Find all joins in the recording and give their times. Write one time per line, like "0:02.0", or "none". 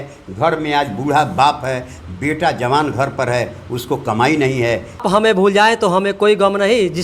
0:05.0